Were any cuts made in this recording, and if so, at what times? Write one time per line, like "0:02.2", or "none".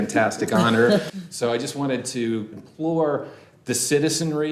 0:01.2
0:02.5